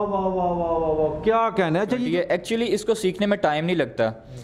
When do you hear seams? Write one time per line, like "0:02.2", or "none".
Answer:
0:02.0

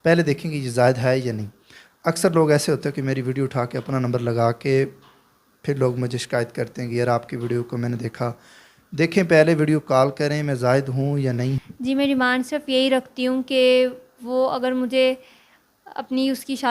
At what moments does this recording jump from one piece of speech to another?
0:11.6

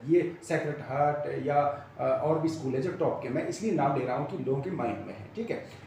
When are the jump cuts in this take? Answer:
none

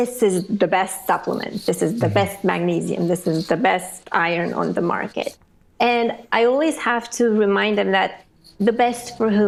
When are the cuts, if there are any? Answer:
none

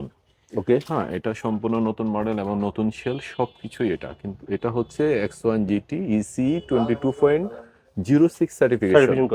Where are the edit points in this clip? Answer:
none

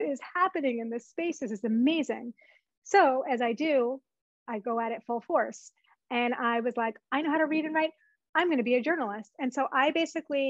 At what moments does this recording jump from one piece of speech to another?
none

